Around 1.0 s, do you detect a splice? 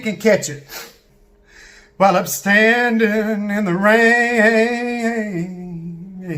yes; 1 cut; at 1.0 s

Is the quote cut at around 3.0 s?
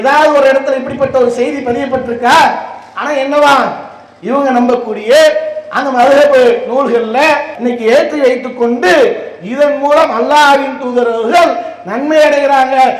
no; 1 cut; at 7.5 s

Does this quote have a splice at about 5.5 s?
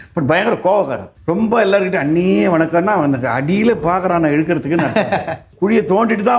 yes; 2 cuts; at 1.1 s, 5.5 s

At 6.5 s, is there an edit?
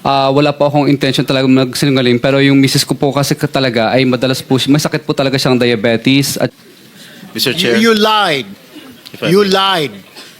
yes; 1 cut; at 6.5 s

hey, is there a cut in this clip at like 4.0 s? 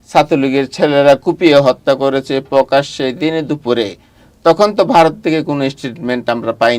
no; 0 cuts

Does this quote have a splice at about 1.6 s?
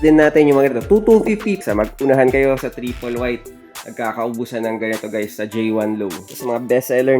yes; 2 cuts; at 1.6 s, 6.2 s

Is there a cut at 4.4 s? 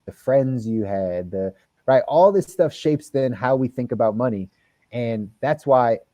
no; 0 cuts

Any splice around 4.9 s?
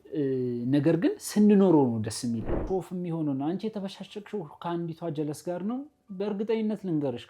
no; 1 cut; at 2.6 s

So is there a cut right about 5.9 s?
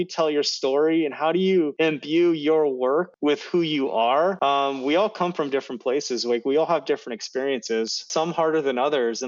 no; 4 cuts; at 1.7 s, 3.1 s, 4.4 s, 8.1 s

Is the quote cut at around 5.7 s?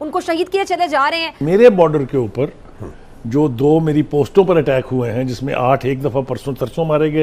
no; 1 cut; at 1.4 s

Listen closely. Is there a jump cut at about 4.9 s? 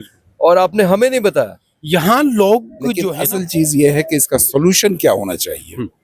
no; 1 cut; at 3.0 s

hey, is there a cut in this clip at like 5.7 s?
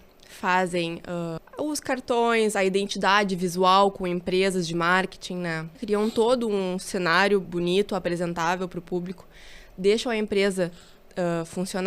yes; 2 cuts; at 1.4 s, 5.7 s

